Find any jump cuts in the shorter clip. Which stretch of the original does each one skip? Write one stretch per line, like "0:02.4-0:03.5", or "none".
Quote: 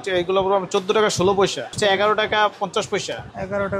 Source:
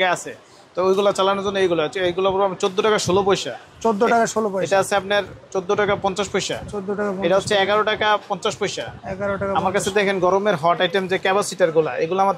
0:03.7-0:07.5